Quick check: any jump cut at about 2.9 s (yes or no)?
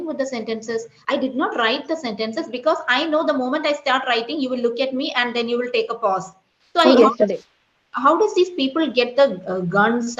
no